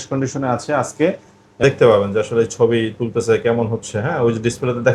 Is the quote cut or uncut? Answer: cut